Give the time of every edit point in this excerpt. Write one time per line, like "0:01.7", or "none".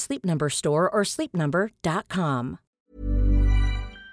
0:02.6